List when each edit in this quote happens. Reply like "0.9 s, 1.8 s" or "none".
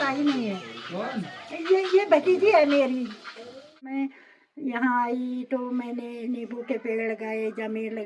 3.9 s

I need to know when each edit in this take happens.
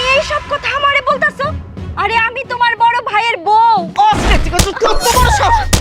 3.9 s

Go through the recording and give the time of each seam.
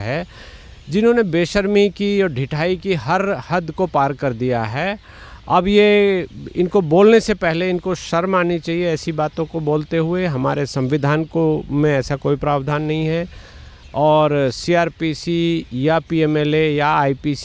none

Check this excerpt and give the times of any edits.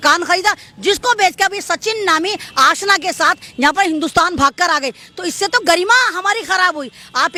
none

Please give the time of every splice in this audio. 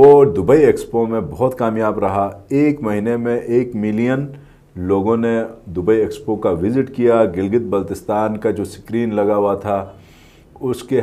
none

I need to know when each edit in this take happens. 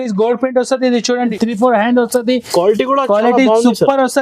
1.3 s

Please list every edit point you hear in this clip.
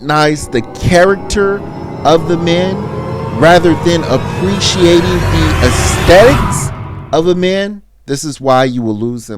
7.9 s

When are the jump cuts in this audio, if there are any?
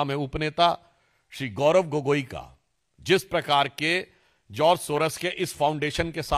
none

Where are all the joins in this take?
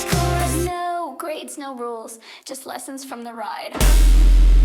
none

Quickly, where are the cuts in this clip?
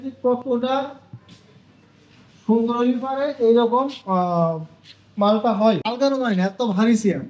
5.9 s

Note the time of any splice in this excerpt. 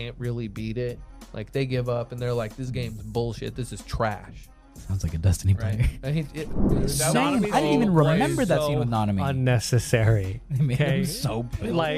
6.7 s

